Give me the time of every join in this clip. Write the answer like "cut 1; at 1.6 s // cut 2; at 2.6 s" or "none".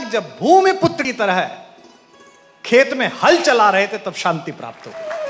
cut 1; at 1.0 s